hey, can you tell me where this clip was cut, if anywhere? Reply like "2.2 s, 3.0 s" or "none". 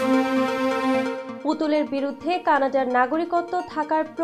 1.3 s